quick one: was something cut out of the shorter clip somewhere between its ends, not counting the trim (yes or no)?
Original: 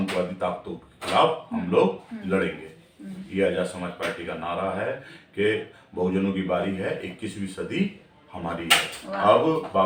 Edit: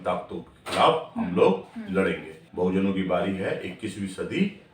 yes